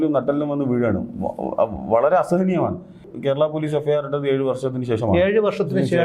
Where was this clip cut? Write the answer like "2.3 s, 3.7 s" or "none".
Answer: 3.1 s